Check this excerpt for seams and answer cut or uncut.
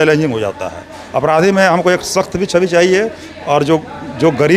uncut